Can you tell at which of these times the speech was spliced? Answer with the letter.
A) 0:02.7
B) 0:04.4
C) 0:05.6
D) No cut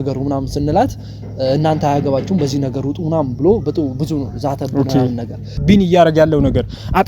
C